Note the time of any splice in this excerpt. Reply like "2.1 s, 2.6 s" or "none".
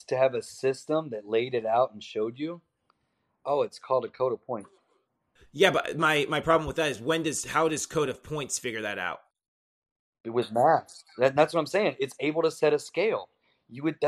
none